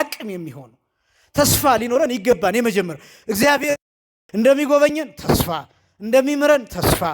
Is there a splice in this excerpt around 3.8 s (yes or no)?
yes